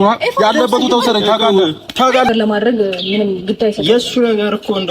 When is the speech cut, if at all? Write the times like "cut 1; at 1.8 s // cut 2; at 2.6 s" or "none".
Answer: cut 1; at 2.3 s